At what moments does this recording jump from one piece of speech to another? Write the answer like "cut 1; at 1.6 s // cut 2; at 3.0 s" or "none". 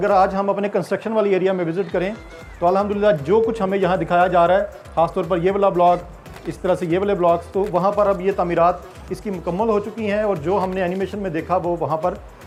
none